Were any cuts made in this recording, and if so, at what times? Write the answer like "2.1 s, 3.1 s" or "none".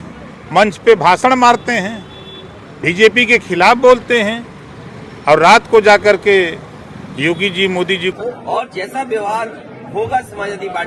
8.1 s